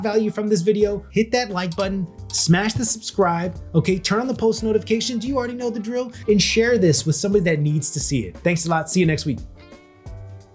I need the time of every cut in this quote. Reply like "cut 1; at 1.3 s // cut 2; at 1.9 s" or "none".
cut 1; at 9.4 s